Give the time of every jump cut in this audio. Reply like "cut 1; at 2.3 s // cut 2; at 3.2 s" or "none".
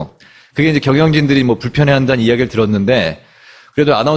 cut 1; at 3.1 s

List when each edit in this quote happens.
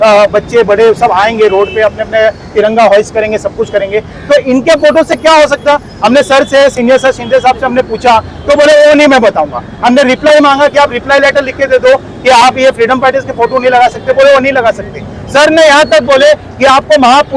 none

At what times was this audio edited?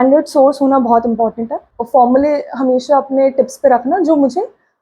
cut 1; at 1.8 s

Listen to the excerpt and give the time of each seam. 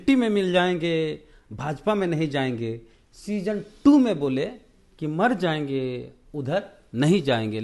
none

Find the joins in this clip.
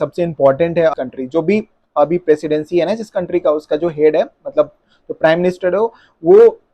cut 1; at 0.9 s

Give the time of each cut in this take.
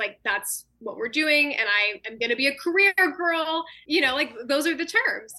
cut 1; at 3.8 s

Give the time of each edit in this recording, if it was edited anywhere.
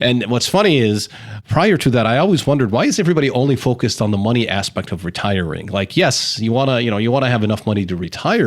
cut 1; at 1.3 s

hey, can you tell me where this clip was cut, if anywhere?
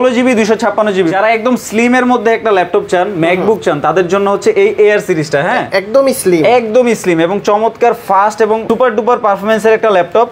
cut 1; at 1.1 s // cut 2; at 8.6 s

